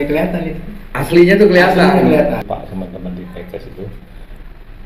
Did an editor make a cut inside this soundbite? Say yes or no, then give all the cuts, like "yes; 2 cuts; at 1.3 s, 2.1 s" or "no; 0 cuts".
yes; 1 cut; at 2.4 s